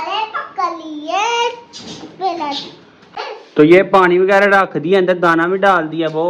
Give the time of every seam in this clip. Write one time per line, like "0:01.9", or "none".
0:03.1

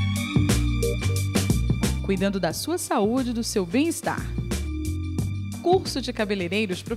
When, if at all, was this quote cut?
none

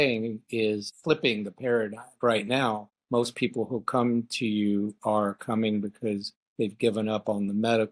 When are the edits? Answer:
0:00.9
0:02.2
0:02.9
0:06.4

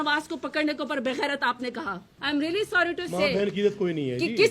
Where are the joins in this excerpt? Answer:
0:02.1

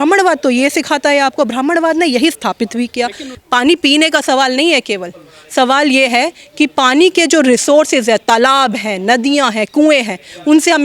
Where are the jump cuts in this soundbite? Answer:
0:03.3

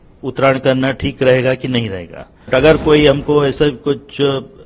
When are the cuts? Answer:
0:02.5

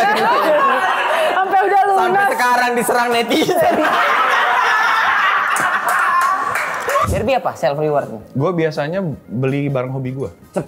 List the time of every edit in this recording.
0:07.1

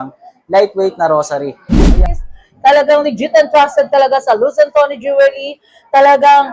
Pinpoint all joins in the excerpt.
0:02.0

